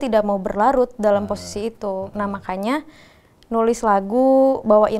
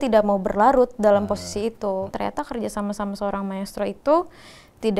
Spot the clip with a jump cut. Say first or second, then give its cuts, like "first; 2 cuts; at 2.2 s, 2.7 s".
second; 1 cut; at 2.1 s